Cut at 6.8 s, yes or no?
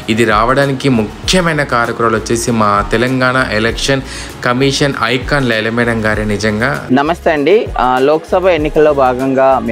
yes